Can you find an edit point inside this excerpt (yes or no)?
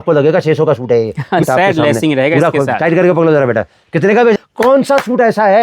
yes